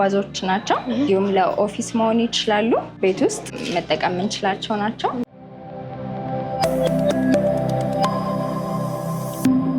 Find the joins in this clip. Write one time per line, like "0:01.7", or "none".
0:01.1
0:03.0
0:05.3